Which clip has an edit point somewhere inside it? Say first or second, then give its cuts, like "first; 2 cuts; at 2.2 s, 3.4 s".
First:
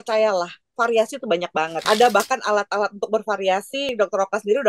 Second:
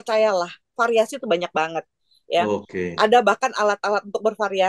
first; 2 cuts; at 1.8 s, 3.9 s